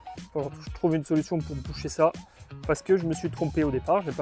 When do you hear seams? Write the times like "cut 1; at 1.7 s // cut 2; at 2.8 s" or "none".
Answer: none